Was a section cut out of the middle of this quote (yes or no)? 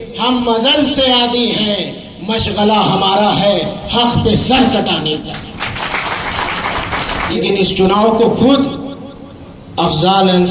yes